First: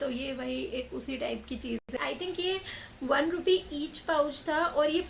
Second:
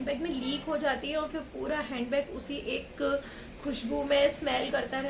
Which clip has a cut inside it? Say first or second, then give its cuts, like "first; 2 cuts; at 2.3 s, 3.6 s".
first; 1 cut; at 1.8 s